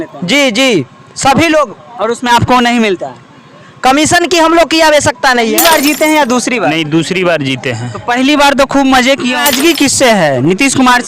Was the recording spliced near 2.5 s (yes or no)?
no